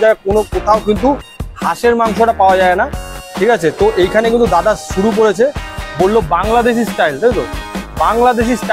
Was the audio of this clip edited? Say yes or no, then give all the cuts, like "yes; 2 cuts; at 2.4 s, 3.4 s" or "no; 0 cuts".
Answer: no; 0 cuts